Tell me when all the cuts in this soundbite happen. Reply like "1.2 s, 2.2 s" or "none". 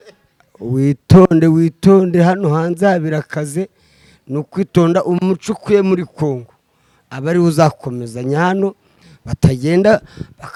none